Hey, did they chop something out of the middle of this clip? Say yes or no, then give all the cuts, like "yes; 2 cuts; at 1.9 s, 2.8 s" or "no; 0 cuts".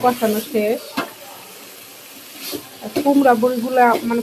no; 0 cuts